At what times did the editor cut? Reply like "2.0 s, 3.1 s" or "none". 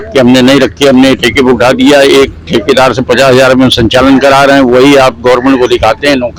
none